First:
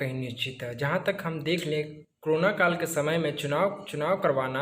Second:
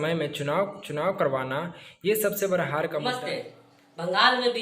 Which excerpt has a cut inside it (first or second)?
second